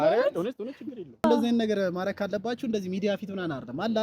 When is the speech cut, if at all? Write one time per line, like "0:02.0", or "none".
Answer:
0:01.2